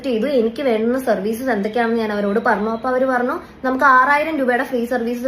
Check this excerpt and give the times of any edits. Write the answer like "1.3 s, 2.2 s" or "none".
1.0 s